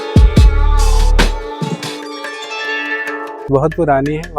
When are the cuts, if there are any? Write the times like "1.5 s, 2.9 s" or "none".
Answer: 3.4 s